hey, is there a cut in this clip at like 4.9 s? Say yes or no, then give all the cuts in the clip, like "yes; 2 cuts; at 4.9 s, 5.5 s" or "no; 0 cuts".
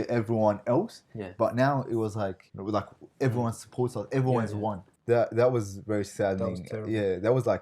yes; 1 cut; at 4.9 s